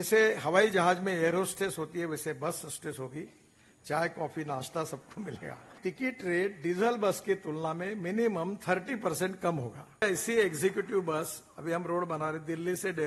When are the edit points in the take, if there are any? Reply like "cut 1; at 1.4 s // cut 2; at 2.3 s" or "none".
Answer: cut 1; at 5.8 s // cut 2; at 10.0 s